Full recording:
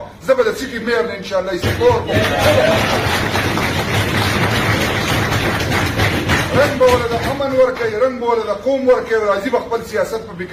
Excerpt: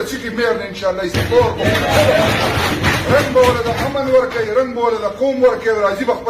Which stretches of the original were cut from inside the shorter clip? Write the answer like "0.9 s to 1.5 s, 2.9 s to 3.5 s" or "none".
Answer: 3.2 s to 6.2 s